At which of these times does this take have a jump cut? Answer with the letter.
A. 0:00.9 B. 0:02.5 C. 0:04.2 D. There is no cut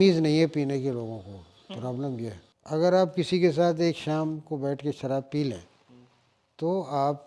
B